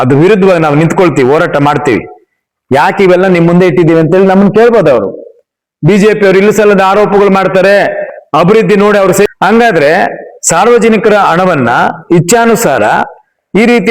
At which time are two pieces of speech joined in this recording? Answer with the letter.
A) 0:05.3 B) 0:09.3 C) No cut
B